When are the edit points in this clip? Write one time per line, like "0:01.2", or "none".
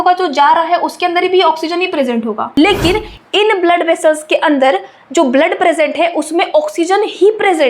0:02.4